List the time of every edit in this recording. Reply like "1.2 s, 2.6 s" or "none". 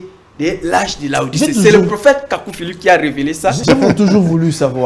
3.6 s